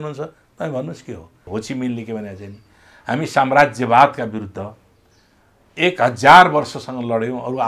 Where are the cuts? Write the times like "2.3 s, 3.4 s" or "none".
1.4 s